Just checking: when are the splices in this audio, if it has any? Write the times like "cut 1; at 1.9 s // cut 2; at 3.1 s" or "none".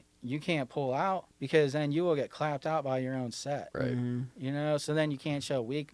cut 1; at 1.3 s

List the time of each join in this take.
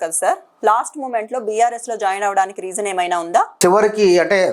cut 1; at 3.5 s

